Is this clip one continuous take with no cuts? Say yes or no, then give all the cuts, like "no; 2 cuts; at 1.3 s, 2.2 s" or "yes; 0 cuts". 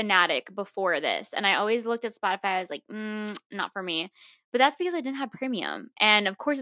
yes; 0 cuts